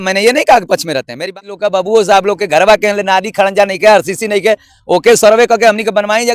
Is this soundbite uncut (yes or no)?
no